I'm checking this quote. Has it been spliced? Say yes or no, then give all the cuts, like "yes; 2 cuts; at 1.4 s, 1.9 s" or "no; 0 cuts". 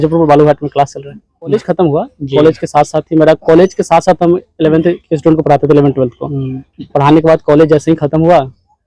yes; 1 cut; at 1.5 s